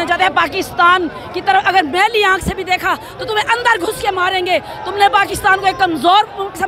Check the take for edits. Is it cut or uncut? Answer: uncut